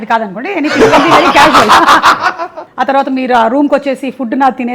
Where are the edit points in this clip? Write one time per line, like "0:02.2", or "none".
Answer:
0:02.6

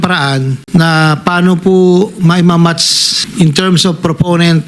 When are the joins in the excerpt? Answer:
none

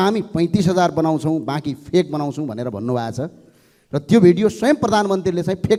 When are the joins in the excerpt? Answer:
none

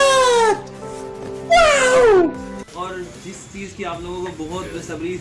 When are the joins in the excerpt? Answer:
0:02.6

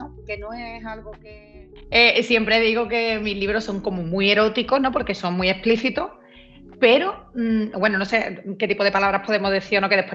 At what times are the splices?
0:01.7

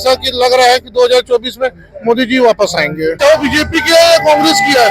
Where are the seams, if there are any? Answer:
0:03.2

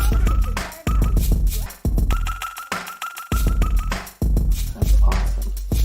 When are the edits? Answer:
0:02.1

